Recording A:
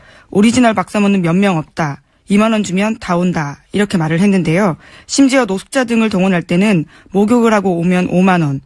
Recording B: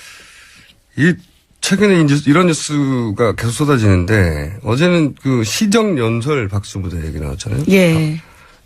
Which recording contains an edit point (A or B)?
B